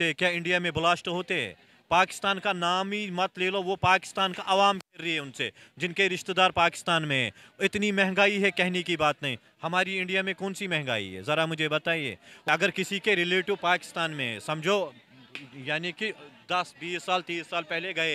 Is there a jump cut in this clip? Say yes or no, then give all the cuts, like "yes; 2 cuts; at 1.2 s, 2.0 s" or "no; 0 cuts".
yes; 1 cut; at 12.5 s